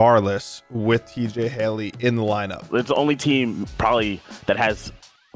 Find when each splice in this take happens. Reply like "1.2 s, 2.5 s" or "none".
2.7 s